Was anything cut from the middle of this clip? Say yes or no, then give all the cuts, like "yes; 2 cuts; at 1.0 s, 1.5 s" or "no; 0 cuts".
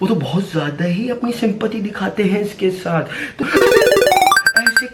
yes; 1 cut; at 3.4 s